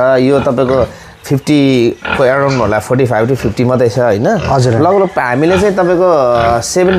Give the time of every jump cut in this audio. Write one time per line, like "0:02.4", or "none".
none